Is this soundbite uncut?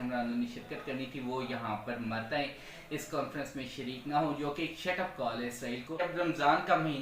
no; 1 cut; at 6.0 s

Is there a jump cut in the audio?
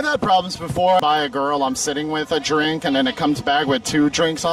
yes; 1 cut; at 1.0 s

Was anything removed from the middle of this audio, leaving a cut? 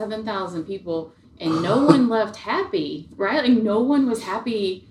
no; 0 cuts

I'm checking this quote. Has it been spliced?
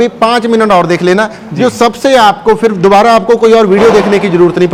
no; 0 cuts

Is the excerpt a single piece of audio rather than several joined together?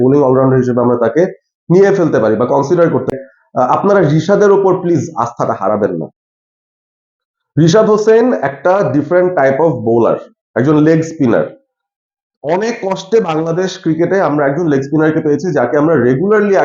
no; 1 cut; at 3.1 s

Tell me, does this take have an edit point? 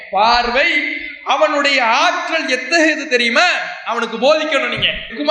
no; 0 cuts

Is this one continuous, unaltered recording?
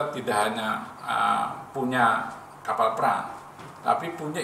yes; 0 cuts

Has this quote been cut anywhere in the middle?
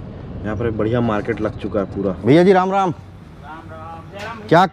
yes; 1 cut; at 2.1 s

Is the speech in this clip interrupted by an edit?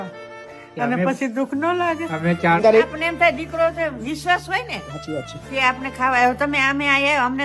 yes; 1 cut; at 2.6 s

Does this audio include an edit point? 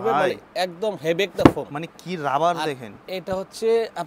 no; 0 cuts

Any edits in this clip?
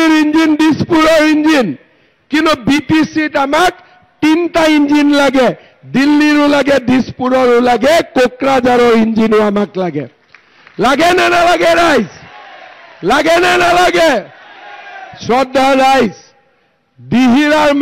no; 0 cuts

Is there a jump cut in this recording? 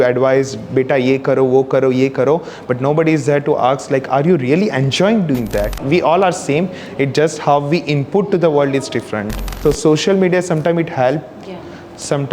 yes; 2 cuts; at 5.8 s, 9.6 s

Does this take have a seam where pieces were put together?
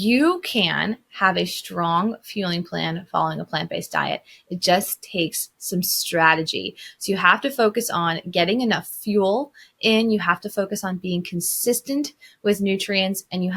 no; 0 cuts

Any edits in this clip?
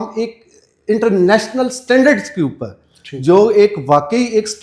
no; 0 cuts

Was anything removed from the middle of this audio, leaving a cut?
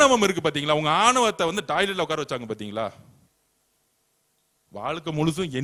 no; 0 cuts

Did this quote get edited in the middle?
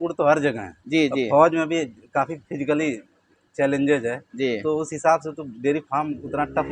no; 0 cuts

